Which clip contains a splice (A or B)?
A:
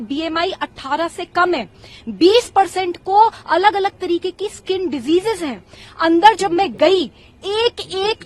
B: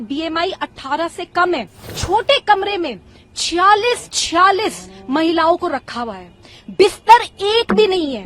B